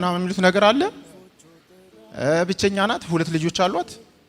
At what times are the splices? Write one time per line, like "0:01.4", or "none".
none